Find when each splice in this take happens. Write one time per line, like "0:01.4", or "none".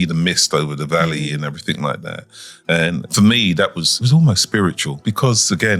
0:03.1
0:04.0
0:04.9